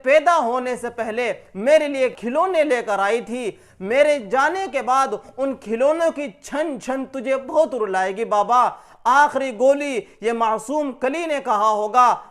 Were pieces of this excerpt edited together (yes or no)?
no